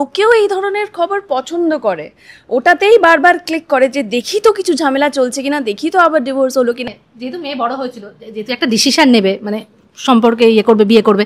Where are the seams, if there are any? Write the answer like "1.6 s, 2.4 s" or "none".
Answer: 6.9 s